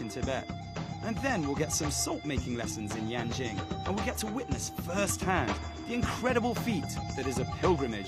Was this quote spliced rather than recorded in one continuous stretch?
yes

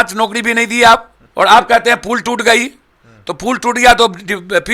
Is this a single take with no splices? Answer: no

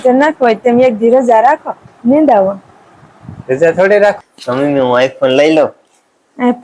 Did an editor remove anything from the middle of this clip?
yes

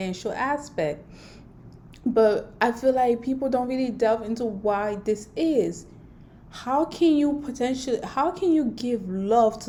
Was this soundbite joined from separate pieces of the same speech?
no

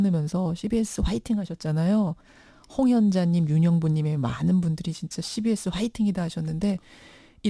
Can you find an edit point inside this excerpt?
yes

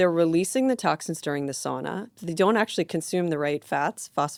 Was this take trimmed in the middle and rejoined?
no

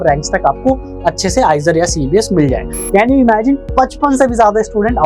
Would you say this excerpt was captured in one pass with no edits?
no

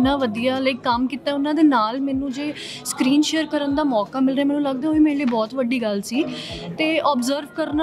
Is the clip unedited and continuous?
yes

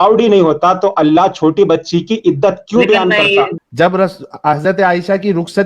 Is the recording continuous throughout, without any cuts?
no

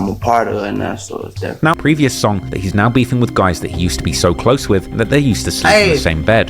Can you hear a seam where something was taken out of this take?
yes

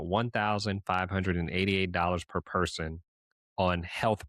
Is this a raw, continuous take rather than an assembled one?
yes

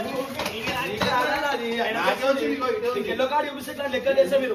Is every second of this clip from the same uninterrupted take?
yes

